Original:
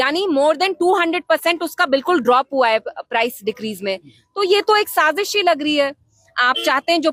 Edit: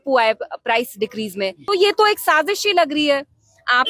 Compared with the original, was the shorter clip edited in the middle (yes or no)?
yes